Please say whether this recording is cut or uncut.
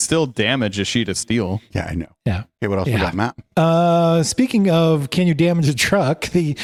uncut